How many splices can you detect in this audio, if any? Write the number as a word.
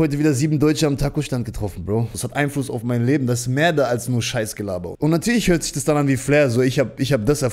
two